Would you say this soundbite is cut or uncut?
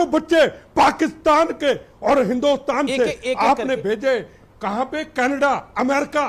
uncut